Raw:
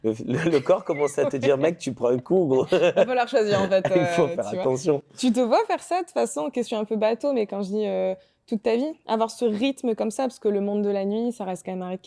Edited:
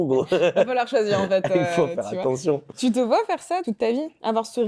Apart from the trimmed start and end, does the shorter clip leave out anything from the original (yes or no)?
yes